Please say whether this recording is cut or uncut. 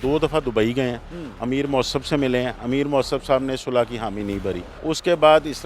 cut